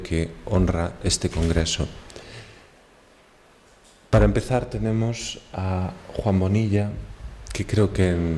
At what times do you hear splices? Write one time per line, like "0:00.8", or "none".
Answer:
0:04.3